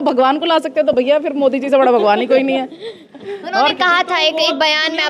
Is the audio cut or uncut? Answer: uncut